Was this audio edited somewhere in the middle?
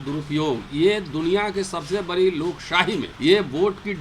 yes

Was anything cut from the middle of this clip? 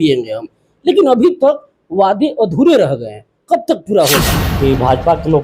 yes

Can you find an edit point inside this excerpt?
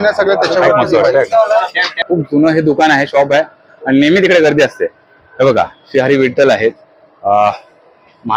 yes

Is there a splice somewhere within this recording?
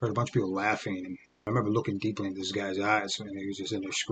yes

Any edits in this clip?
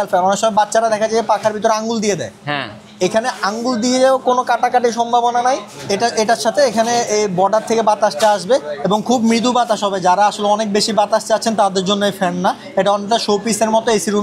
no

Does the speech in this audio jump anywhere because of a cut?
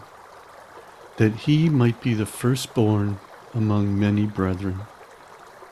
yes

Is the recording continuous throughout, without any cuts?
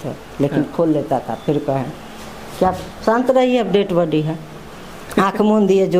yes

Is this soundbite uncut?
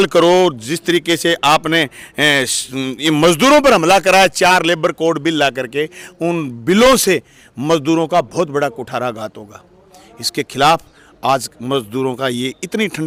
yes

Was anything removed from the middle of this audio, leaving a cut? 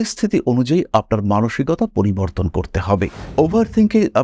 yes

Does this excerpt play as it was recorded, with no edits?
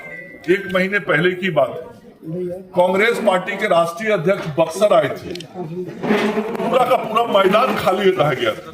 yes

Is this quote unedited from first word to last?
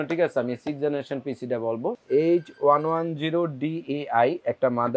no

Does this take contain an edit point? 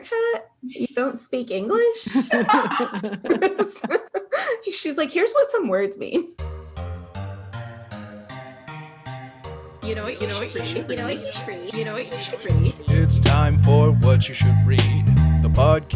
yes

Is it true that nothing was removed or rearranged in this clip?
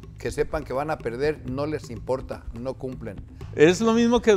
no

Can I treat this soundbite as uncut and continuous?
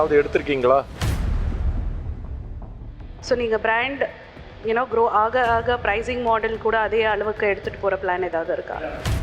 no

